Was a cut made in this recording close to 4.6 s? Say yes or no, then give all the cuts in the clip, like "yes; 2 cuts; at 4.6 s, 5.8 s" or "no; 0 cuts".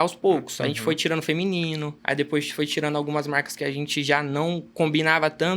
no; 1 cut; at 1.9 s